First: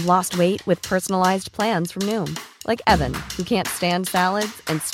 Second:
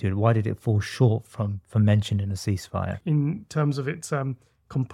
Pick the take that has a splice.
second; 1 cut; at 3.0 s

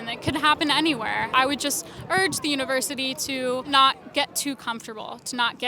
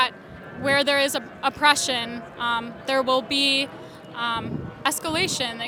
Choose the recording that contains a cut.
first; 2 cuts; at 1.3 s, 3.7 s

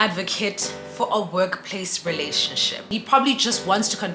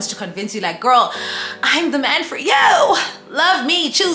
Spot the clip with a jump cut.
first; 1 cut; at 2.9 s

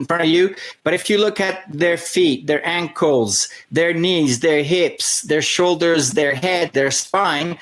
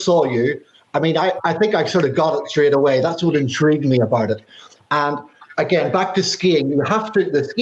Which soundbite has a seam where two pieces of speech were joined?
second; 2 cuts; at 1.4 s, 5.4 s

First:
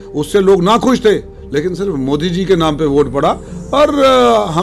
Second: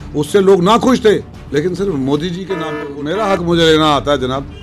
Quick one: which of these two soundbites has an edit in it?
second; 1 cut; at 2.9 s

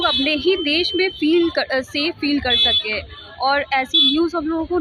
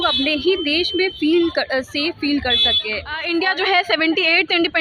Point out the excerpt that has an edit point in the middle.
second; 1 cut; at 3.1 s

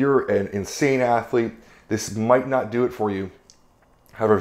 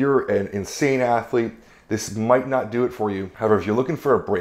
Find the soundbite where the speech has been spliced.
second; 1 cut; at 3.3 s

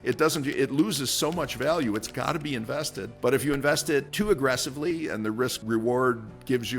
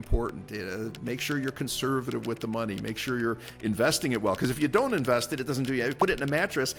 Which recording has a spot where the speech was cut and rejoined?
first; 3 cuts; at 3.0 s, 4.1 s, 5.6 s

